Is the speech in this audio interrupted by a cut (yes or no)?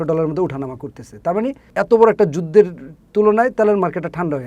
yes